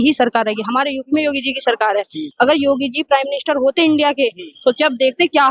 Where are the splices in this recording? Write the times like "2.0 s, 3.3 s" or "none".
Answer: 2.2 s